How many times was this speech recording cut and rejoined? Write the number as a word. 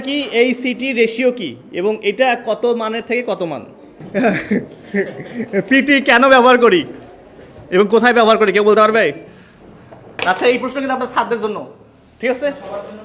two